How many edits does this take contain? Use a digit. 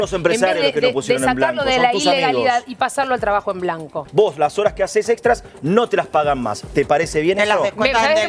1